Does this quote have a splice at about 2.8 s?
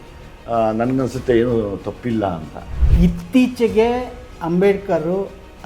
yes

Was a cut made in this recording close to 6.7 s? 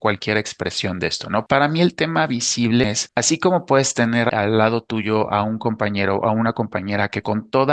no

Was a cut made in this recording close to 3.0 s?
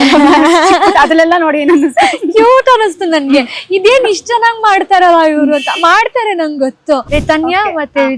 no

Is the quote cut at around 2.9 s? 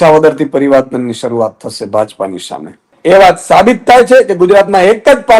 yes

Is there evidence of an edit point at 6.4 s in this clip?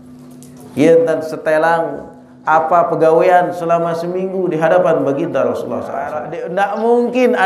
yes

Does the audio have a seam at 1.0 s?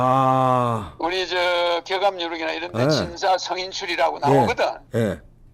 no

